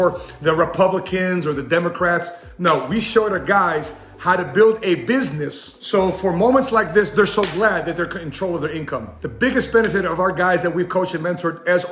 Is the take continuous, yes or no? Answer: yes